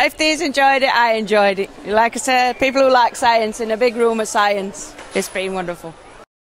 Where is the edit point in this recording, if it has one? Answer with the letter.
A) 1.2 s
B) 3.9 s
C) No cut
C